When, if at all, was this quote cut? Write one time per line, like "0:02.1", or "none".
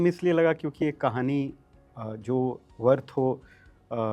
none